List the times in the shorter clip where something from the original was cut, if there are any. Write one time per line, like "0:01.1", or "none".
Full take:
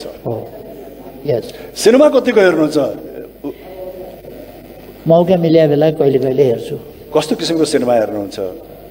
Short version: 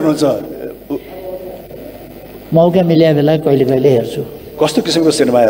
none